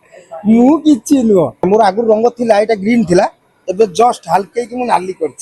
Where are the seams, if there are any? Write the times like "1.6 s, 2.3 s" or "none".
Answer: 1.6 s